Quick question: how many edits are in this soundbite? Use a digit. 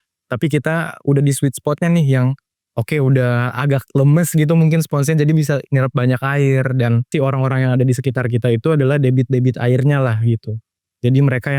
1